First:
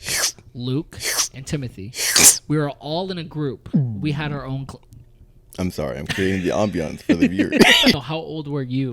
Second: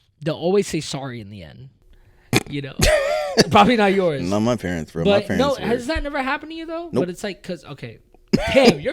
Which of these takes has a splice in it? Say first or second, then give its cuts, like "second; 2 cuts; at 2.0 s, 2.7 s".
first; 1 cut; at 8.0 s